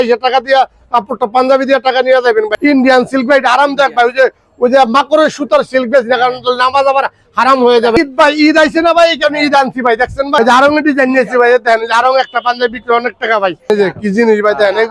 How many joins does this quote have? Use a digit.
4